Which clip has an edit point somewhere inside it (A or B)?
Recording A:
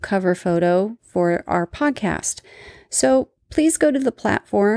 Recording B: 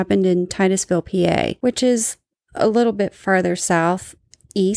B